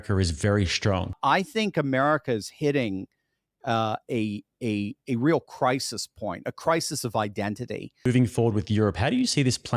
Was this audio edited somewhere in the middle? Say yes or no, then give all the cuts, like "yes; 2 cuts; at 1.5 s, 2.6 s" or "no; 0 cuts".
yes; 2 cuts; at 1.2 s, 8.1 s